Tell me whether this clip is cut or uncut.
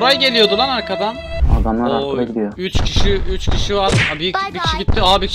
cut